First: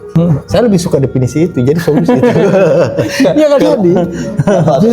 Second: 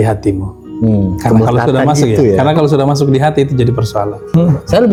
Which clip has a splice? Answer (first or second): first